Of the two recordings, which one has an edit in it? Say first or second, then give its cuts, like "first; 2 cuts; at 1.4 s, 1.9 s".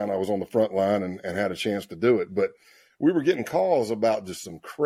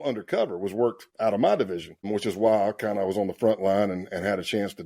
second; 1 cut; at 1.1 s